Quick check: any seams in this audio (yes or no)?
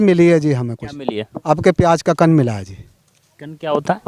no